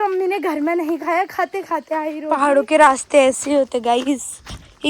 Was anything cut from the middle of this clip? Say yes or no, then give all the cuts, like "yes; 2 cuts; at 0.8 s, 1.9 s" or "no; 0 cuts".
yes; 1 cut; at 2.2 s